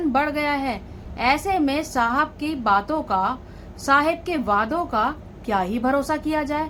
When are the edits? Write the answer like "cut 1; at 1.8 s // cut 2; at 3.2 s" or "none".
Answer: none